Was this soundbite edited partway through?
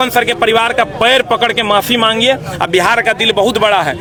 no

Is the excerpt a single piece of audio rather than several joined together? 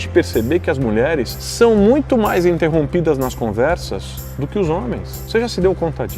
yes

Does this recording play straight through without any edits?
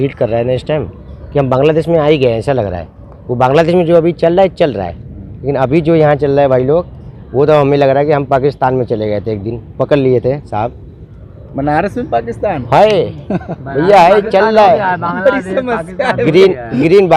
yes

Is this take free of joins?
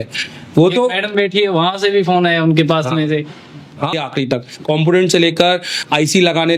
no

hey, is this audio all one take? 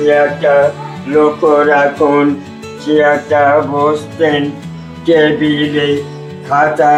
yes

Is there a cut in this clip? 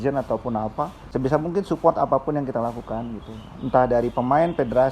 yes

